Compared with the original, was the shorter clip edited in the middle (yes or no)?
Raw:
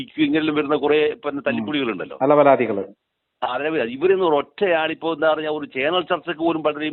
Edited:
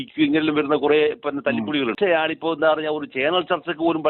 yes